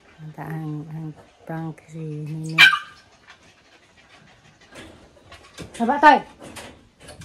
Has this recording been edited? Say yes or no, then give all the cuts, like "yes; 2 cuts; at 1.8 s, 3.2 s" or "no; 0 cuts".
no; 0 cuts